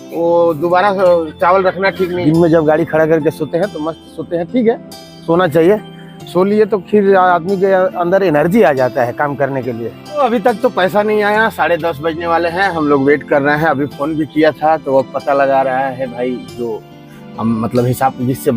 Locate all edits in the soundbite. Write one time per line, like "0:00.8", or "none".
0:02.2
0:10.2